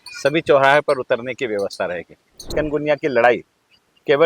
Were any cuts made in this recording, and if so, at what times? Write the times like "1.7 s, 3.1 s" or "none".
2.4 s

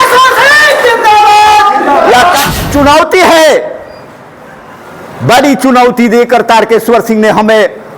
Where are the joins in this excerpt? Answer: 2.6 s

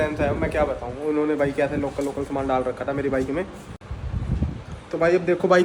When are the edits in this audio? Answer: none

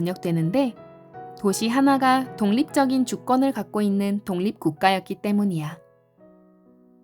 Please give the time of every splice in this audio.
5.8 s

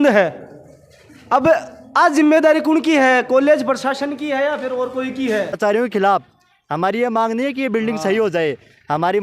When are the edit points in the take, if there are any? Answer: 5.6 s

